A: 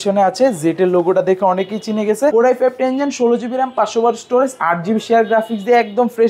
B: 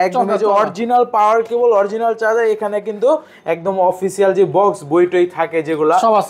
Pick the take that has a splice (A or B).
A